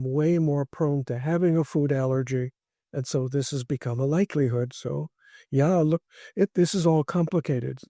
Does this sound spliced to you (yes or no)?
no